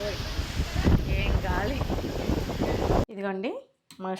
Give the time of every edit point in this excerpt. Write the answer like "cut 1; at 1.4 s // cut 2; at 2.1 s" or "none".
cut 1; at 3.0 s